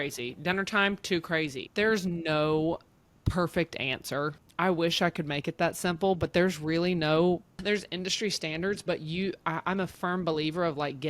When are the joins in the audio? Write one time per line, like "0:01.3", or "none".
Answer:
0:01.6
0:04.4
0:07.6